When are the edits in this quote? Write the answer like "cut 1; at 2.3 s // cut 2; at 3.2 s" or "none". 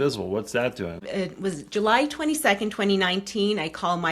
cut 1; at 1.0 s